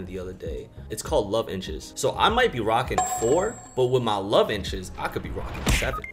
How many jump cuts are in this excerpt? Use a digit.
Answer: 0